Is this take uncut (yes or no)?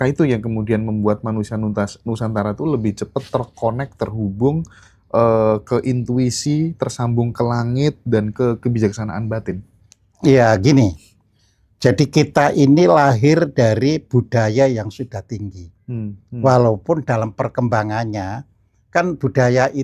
yes